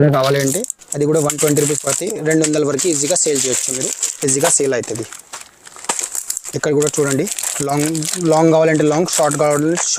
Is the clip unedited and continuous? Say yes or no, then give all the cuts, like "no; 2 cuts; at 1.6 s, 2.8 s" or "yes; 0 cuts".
yes; 0 cuts